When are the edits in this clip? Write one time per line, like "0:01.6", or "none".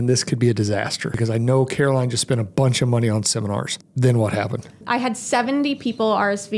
0:01.2
0:03.7
0:04.8